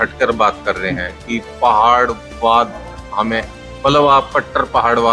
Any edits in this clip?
no; 0 cuts

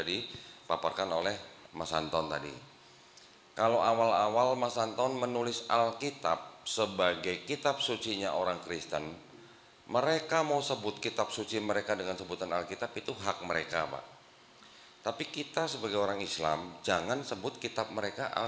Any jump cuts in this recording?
no; 0 cuts

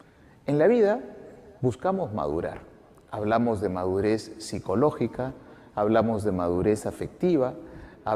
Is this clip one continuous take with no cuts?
no; 1 cut; at 5.8 s

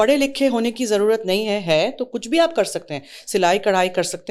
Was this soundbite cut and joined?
no; 0 cuts

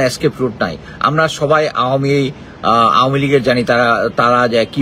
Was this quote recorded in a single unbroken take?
yes; 0 cuts

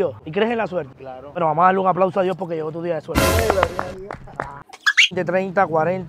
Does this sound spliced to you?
yes; 1 cut; at 5.1 s

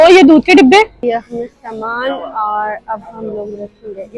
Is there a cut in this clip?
yes; 1 cut; at 1.0 s

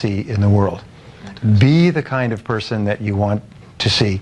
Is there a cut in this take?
no; 0 cuts

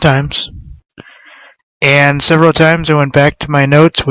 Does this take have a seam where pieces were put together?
yes; 1 cut; at 1.7 s

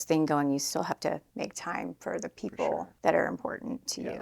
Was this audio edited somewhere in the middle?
yes; 1 cut; at 2.9 s

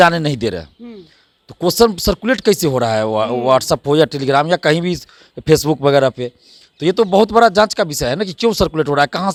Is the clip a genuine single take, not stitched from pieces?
yes; 0 cuts

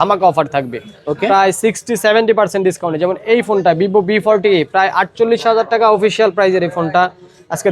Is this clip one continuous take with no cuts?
yes; 0 cuts

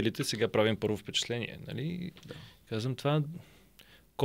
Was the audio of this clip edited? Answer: no; 0 cuts

